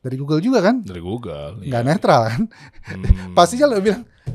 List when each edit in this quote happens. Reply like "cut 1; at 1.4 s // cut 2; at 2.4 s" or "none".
none